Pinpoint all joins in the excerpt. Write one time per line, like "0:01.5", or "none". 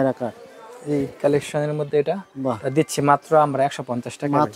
none